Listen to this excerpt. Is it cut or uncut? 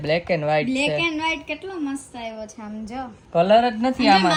uncut